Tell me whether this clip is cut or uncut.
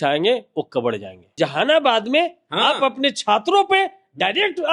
cut